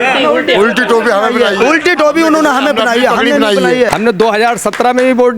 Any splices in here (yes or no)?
yes